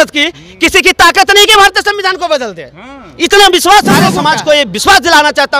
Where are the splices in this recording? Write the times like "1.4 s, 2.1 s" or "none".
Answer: 4.1 s